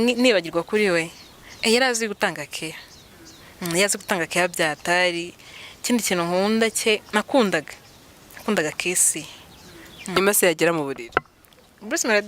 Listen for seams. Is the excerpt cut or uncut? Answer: cut